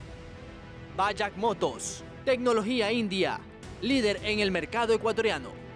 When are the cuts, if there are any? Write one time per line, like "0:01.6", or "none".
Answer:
0:01.0